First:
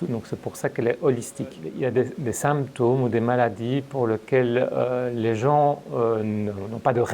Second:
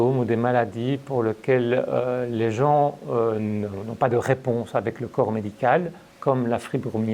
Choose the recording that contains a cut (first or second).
first